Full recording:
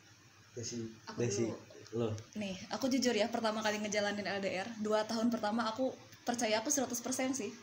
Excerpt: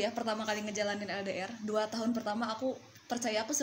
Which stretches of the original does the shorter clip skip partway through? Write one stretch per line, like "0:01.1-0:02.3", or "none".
none